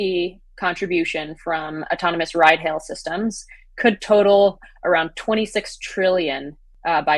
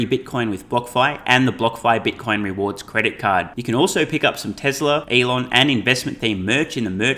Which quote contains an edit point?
second; 1 cut; at 5.1 s

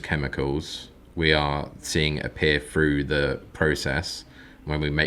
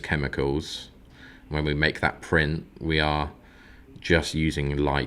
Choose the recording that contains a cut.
second; 1 cut; at 1.0 s

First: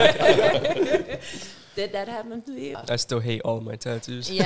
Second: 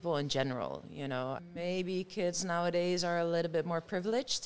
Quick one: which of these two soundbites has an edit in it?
first; 1 cut; at 2.8 s

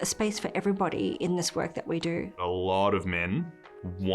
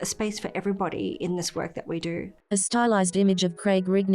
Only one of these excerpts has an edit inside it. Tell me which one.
first; 1 cut; at 2.3 s

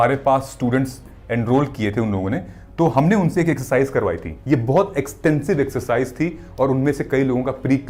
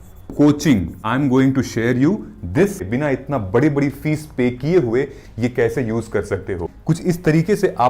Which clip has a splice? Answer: second; 3 cuts; at 1.0 s, 2.8 s, 6.7 s

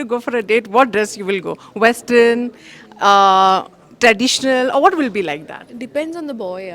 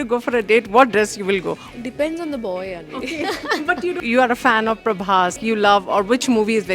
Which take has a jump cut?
second; 3 cuts; at 1.6 s, 4.0 s, 5.4 s

